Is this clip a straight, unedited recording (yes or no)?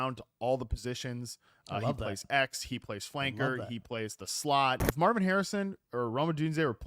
no